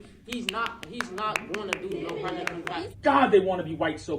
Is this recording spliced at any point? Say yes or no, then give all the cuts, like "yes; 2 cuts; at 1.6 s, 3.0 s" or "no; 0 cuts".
yes; 1 cut; at 2.8 s